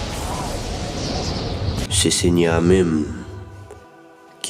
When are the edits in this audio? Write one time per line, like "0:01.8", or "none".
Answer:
0:01.2